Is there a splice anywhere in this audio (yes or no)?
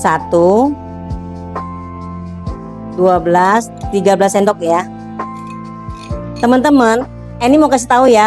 yes